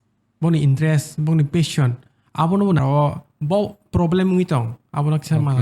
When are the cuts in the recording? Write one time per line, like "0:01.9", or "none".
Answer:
0:02.8